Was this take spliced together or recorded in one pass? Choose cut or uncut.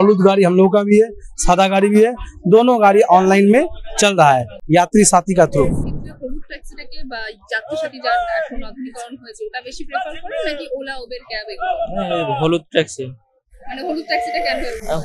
uncut